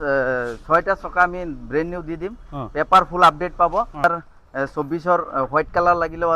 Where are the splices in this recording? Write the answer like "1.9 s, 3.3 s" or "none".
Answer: 4.0 s